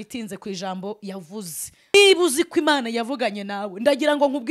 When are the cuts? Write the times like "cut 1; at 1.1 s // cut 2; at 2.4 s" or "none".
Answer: cut 1; at 1.9 s